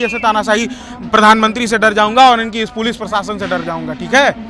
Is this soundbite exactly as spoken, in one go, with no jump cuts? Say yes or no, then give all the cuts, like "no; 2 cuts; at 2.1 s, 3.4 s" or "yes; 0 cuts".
yes; 0 cuts